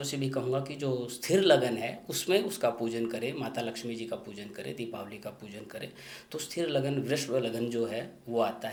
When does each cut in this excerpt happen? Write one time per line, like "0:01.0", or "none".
none